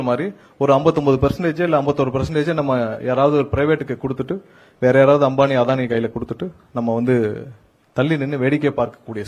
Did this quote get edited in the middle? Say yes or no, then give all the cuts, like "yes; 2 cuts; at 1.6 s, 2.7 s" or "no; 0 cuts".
no; 0 cuts